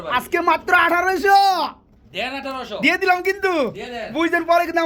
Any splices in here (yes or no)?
no